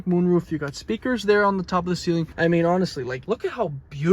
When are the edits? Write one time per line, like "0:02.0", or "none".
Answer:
0:02.3
0:03.1